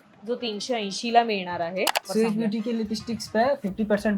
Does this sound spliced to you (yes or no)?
yes